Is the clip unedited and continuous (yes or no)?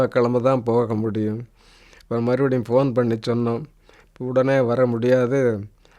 yes